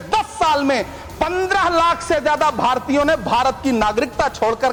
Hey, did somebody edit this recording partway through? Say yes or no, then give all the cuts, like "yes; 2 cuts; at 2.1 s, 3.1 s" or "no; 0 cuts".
no; 0 cuts